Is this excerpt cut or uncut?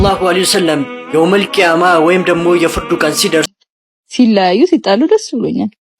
cut